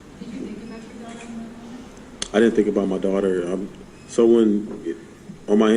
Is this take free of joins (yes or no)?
yes